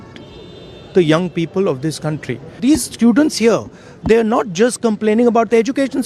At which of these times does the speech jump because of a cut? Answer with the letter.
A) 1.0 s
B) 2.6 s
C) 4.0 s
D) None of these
B